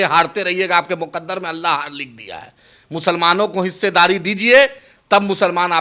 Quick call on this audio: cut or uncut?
uncut